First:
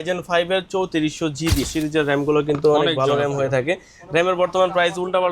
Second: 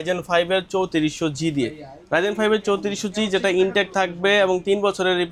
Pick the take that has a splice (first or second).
first